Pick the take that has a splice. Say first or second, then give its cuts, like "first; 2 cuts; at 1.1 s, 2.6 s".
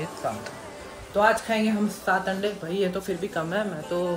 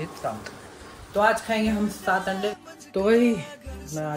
second; 1 cut; at 2.6 s